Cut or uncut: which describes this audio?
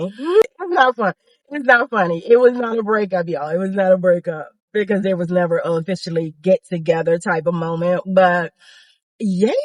uncut